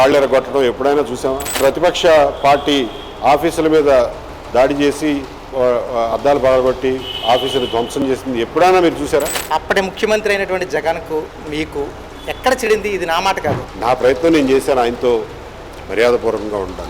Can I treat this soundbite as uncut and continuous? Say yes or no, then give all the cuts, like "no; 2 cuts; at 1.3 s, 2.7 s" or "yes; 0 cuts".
no; 3 cuts; at 1.6 s, 9.4 s, 13.7 s